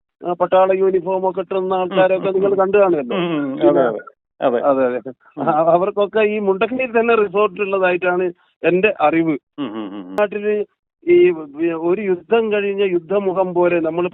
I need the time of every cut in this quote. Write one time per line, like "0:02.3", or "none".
0:10.2

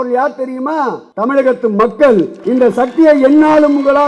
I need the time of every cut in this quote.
0:01.0
0:02.4

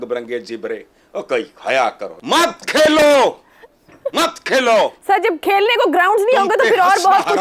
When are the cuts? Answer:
0:02.1

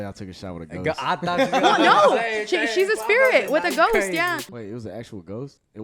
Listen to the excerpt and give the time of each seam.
0:04.5

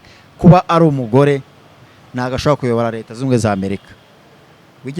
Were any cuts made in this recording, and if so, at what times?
none

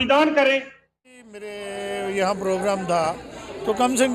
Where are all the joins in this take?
0:01.0

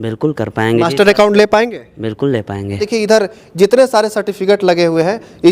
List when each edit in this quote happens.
0:02.8

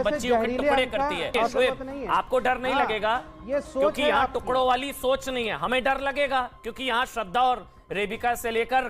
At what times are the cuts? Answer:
0:01.5

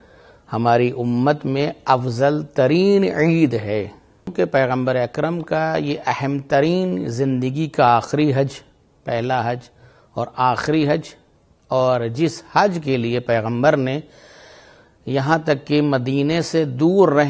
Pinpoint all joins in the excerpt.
0:04.3

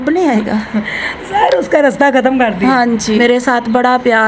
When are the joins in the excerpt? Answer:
0:03.2

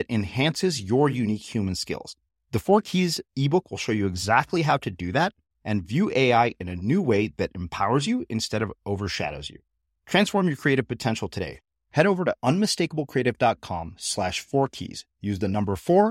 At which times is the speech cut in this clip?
none

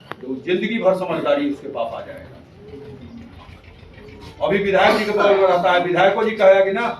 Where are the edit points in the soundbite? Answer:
none

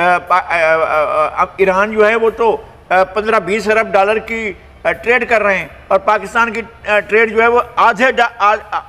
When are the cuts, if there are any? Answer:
none

